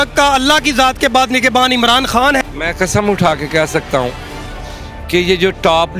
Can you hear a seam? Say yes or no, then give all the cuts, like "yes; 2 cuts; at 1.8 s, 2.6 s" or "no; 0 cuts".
yes; 1 cut; at 2.4 s